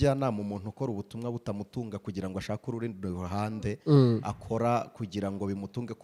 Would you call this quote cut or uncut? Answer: uncut